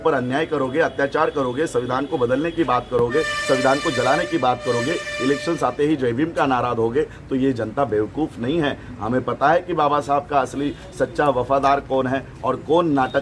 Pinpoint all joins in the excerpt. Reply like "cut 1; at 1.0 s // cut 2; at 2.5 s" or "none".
none